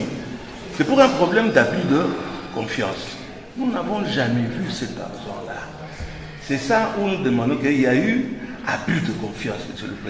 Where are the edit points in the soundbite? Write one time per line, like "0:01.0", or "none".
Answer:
0:03.4

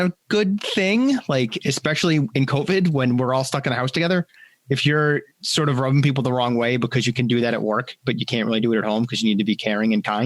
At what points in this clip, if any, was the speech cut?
none

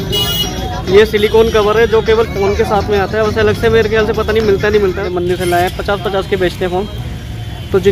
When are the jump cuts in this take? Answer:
0:05.1

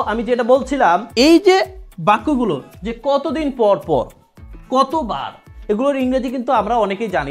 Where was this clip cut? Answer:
0:01.1

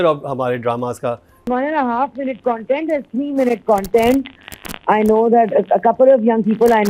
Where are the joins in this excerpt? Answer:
0:01.5

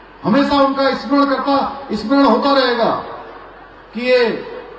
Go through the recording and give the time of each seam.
none

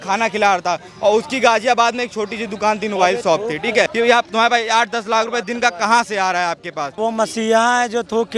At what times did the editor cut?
0:03.9
0:07.0

